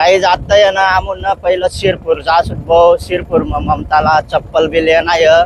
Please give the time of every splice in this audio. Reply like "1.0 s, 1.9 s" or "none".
none

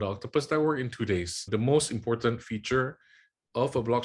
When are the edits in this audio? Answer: 1.4 s

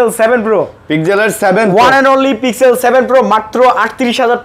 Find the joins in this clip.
none

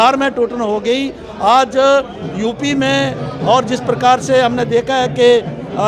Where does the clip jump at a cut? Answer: none

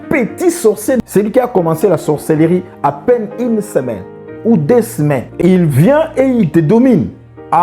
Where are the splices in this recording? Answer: 1.0 s

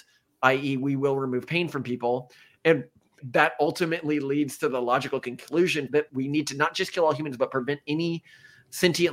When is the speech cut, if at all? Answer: 3.2 s, 6.0 s

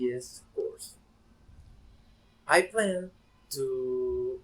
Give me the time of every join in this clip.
2.5 s

